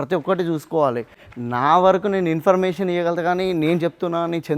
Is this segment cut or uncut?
cut